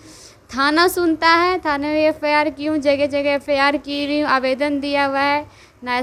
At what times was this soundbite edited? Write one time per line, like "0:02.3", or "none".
none